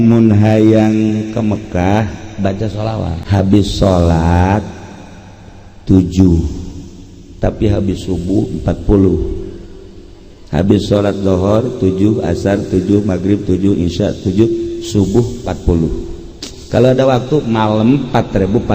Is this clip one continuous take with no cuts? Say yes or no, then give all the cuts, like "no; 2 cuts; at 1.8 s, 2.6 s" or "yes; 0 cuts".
no; 1 cut; at 3.2 s